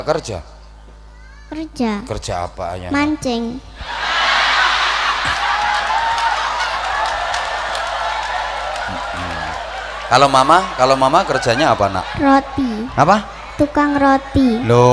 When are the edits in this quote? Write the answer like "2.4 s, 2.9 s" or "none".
none

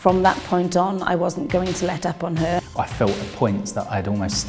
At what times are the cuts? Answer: 2.6 s

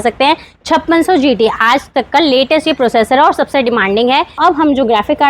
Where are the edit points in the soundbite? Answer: 4.4 s

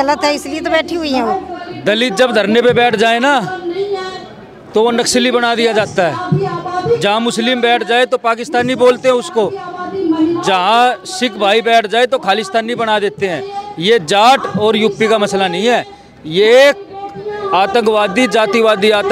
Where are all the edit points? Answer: 1.6 s

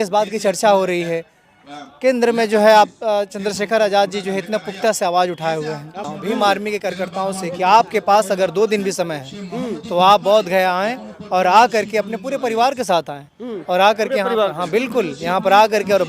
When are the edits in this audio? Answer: 6.0 s

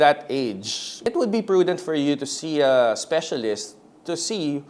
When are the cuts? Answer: 1.0 s

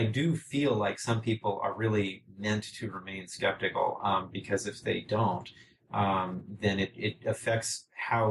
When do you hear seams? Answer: none

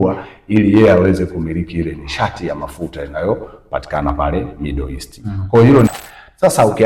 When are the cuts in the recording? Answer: 5.9 s

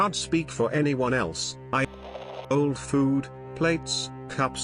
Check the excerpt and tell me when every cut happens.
1.9 s

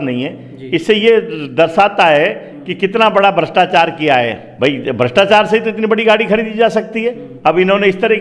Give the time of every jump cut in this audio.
4.4 s, 7.3 s

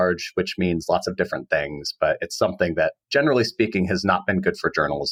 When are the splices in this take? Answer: none

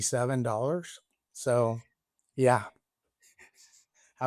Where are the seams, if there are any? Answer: none

